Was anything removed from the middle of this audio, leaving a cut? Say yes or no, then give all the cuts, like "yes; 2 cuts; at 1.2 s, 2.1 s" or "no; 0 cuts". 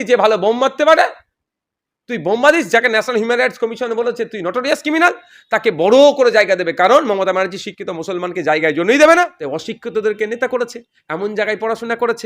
yes; 1 cut; at 9.4 s